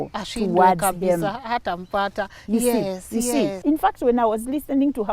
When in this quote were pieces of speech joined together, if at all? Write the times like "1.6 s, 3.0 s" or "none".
3.6 s